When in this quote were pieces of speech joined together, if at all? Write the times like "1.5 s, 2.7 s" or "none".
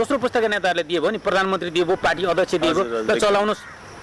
none